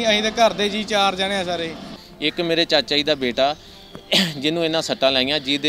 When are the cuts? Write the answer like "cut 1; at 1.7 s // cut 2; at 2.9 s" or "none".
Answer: cut 1; at 2.0 s